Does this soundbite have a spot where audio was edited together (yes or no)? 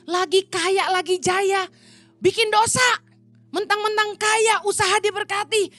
no